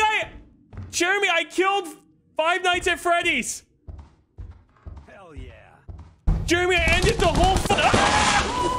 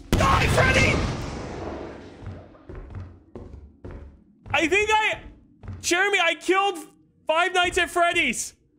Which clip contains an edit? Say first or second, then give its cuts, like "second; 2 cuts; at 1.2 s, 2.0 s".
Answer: first; 1 cut; at 7.7 s